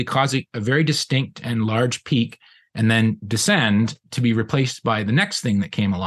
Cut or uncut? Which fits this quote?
cut